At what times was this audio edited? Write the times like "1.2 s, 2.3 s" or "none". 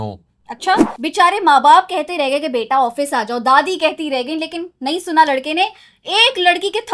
0.9 s